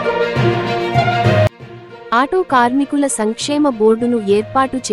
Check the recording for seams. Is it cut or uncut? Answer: uncut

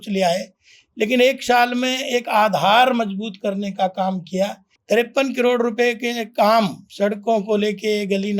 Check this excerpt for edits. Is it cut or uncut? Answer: cut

